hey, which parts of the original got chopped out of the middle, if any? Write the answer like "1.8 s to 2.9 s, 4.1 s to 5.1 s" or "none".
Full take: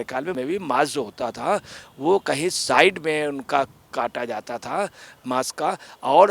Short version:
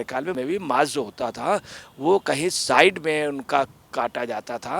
none